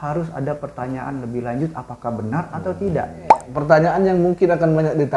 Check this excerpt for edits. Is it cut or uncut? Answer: cut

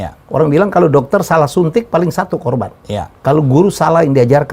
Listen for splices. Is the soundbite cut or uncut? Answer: uncut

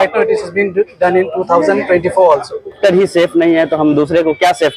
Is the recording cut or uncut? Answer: cut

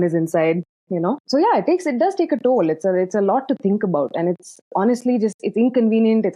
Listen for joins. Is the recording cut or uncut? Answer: cut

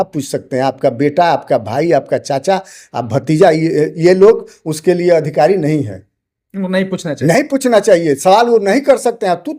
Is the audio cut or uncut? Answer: uncut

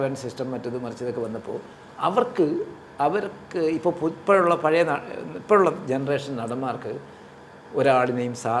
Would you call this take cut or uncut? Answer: uncut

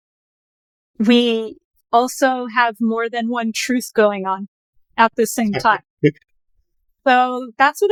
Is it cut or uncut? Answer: uncut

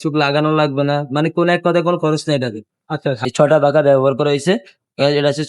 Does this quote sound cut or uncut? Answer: cut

